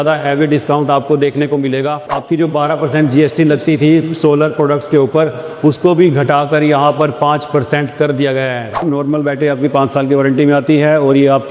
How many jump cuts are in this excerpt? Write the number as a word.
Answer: two